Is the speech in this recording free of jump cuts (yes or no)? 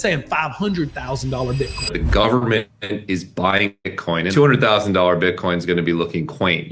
no